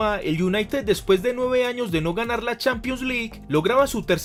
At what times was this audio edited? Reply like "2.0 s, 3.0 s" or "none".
none